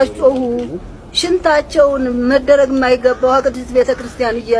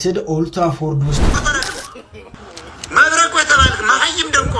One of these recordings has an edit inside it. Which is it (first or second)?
second